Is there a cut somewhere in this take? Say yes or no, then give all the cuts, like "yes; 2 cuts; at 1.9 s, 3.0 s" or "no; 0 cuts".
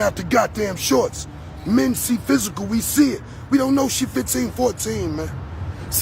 yes; 1 cut; at 3.9 s